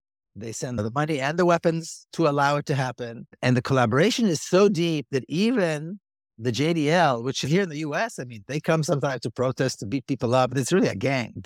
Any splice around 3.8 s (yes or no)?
no